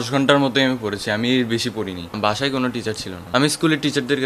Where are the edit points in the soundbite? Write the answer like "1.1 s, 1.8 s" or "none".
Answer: 2.2 s, 3.1 s